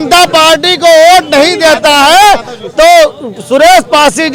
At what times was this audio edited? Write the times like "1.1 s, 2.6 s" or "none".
none